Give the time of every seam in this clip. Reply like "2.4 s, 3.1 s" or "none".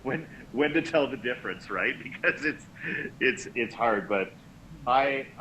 none